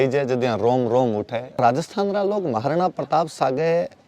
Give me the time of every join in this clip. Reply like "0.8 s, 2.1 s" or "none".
1.6 s